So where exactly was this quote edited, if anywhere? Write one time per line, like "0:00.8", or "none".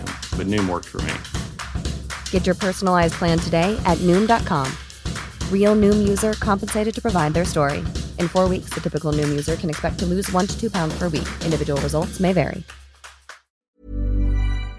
0:13.5